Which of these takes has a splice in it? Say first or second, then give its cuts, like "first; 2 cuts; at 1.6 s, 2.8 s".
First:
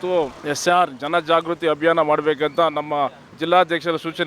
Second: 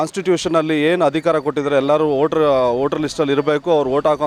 first; 1 cut; at 3.3 s